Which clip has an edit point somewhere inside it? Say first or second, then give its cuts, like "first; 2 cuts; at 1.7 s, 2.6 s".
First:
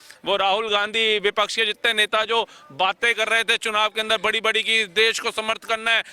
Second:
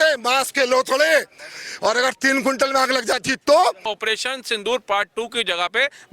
second; 1 cut; at 3.9 s